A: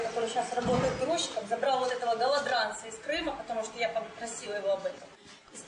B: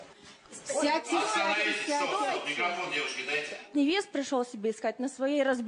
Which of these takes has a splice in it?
B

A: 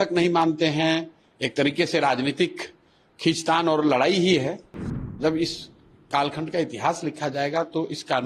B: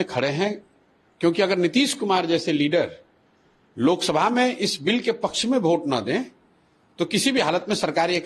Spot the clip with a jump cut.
A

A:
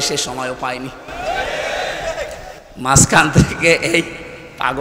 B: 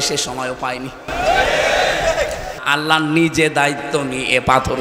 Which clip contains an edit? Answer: B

